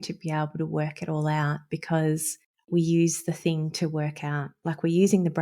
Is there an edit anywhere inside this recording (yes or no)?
yes